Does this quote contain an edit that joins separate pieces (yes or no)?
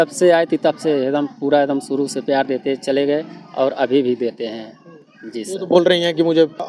no